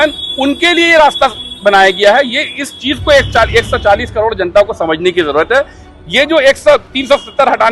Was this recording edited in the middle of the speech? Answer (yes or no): no